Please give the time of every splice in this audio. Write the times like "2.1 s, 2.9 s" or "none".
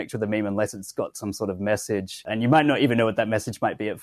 2.2 s